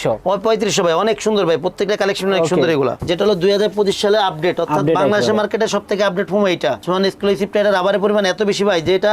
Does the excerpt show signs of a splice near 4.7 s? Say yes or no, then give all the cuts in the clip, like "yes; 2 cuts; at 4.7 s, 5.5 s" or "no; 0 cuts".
no; 2 cuts; at 3.0 s, 6.8 s